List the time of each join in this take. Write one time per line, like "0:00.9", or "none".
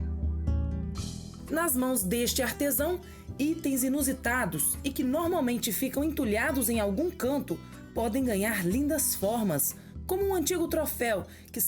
0:01.4